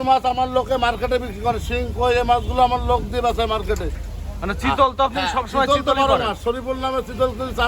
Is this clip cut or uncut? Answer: uncut